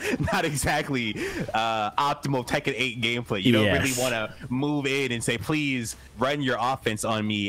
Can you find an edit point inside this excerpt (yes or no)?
no